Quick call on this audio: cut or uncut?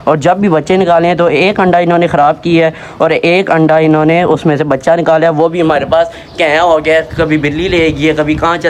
uncut